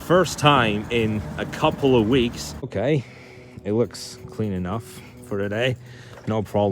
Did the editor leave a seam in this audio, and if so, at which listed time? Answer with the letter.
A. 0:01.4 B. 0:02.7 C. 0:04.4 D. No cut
B